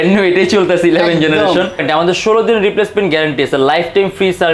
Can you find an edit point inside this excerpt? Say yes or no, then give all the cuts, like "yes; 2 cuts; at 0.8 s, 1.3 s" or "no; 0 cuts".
yes; 1 cut; at 1.8 s